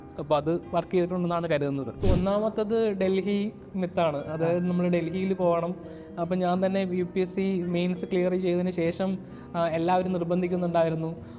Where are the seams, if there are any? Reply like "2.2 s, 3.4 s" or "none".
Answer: 2.0 s